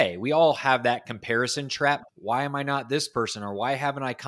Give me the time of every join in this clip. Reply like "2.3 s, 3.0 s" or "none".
2.1 s